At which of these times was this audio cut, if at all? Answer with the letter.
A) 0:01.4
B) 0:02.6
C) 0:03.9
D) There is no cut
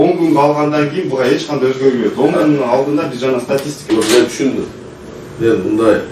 C